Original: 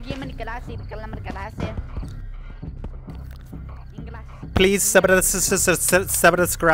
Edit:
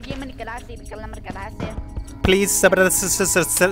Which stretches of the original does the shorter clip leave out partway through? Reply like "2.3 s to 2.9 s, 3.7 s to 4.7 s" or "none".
2.1 s to 4.4 s